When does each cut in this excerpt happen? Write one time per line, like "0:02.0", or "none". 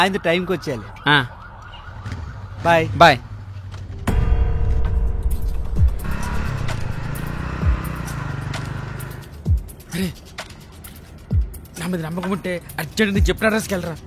none